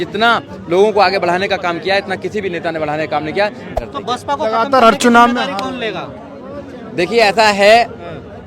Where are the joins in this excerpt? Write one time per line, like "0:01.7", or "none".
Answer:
0:03.7